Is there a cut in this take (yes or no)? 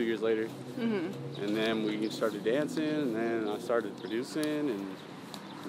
no